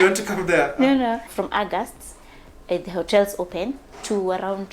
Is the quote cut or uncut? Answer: cut